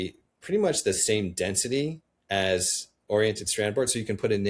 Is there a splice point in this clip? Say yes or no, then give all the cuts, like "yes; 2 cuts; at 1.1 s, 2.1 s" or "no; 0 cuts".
no; 0 cuts